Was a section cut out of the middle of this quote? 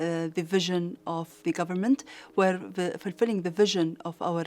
yes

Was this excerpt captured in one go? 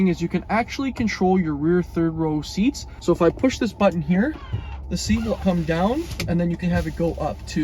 no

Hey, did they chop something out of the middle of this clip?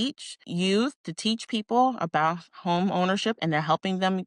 no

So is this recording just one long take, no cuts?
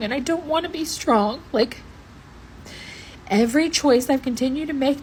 yes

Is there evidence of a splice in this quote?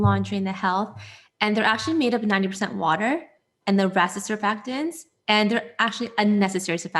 no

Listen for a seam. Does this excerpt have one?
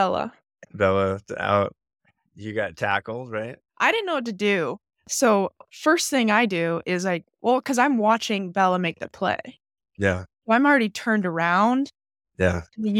yes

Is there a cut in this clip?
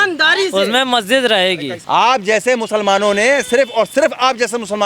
yes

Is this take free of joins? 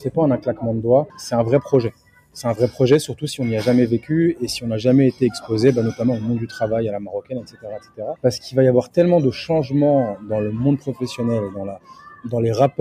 no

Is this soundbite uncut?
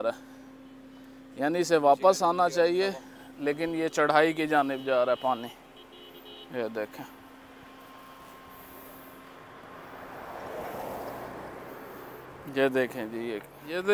yes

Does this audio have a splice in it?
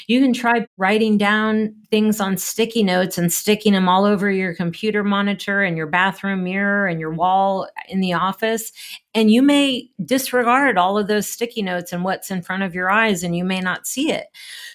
no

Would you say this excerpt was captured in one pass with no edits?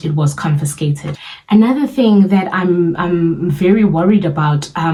yes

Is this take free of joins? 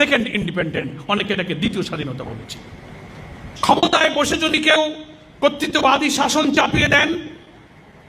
no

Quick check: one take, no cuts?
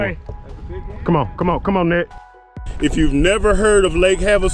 no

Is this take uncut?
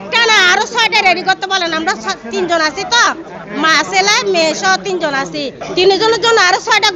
no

